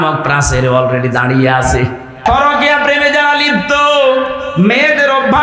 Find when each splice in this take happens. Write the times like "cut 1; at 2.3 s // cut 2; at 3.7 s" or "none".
cut 1; at 2.2 s